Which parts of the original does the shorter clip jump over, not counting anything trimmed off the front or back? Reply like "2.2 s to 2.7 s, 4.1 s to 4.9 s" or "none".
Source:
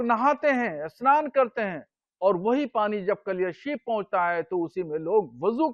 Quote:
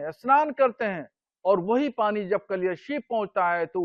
none